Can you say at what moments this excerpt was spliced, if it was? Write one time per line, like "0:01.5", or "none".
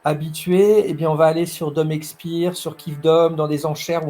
none